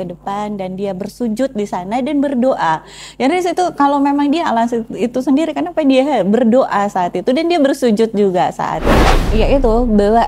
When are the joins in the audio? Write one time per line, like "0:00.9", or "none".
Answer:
0:09.2